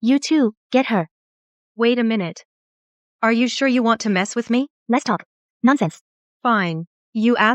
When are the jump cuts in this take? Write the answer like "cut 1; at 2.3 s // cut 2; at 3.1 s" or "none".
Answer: cut 1; at 4.8 s